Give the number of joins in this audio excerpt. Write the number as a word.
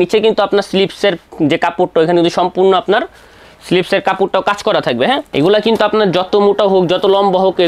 one